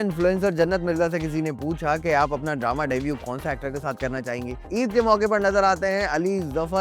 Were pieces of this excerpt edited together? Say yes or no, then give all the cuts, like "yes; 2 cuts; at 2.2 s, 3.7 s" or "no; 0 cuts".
yes; 1 cut; at 4.6 s